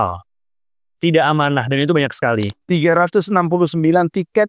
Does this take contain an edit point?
yes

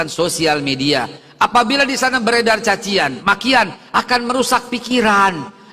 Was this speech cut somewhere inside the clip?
no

